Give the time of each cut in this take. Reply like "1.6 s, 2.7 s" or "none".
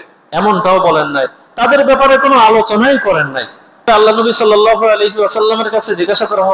3.9 s